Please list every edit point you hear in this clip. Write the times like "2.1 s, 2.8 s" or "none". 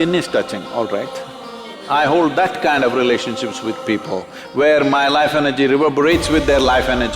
1.8 s

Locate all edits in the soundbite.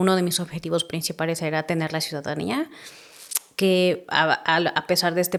none

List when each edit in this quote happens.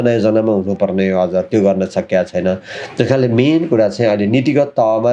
none

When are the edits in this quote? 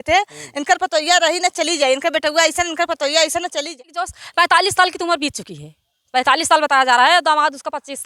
3.8 s

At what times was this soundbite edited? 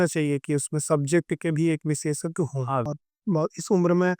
2.9 s

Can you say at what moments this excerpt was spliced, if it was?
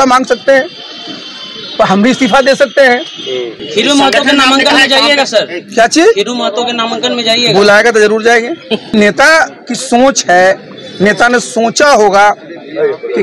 3.6 s, 8.9 s

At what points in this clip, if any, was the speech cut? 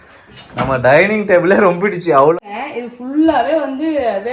2.3 s

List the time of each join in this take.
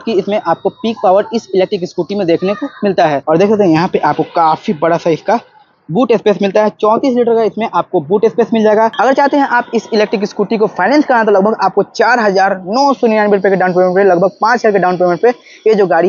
3.2 s, 9.0 s

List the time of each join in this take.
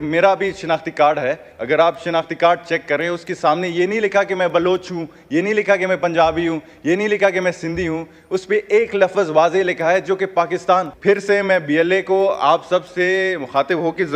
10.9 s

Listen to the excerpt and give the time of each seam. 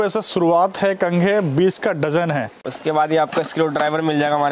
2.6 s

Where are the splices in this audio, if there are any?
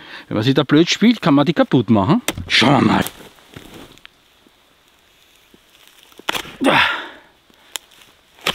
none

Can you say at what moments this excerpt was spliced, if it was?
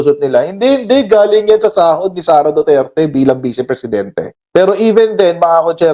none

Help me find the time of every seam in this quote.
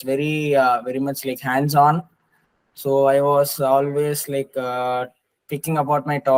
none

